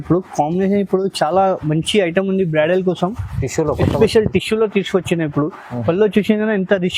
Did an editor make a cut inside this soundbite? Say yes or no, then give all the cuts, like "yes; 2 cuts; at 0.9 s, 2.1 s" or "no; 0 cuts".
no; 0 cuts